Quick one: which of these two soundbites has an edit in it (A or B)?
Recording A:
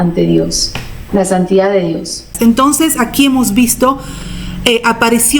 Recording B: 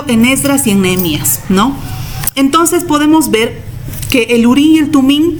A